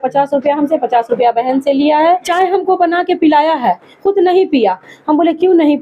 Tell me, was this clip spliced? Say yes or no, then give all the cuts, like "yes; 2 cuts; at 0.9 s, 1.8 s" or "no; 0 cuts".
yes; 1 cut; at 2.3 s